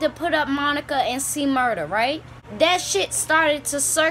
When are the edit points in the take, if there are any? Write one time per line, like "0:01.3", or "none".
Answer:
0:02.5